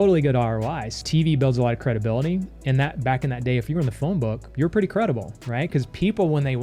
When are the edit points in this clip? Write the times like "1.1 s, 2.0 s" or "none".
1.0 s, 4.4 s